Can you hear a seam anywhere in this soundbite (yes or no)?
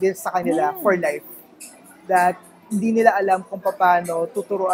no